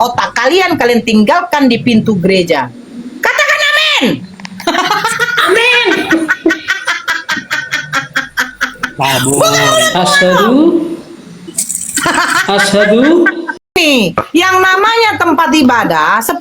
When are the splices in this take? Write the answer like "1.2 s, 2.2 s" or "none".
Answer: 13.7 s